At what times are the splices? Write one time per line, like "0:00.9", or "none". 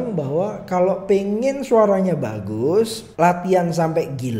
0:03.0

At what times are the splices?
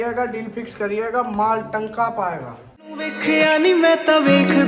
0:03.1

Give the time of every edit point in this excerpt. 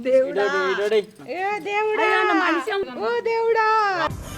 0:01.2
0:02.8

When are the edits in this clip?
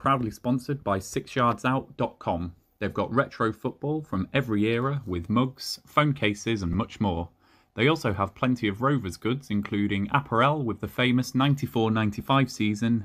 none

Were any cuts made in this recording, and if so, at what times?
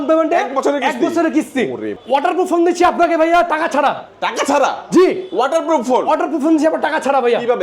0:02.2

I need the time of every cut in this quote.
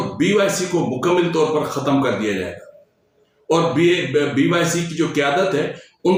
none

